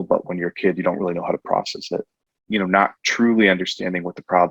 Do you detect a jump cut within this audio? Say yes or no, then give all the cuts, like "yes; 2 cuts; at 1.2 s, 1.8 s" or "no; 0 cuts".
yes; 1 cut; at 2.3 s